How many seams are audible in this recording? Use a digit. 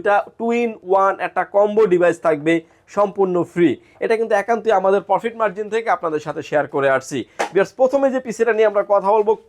0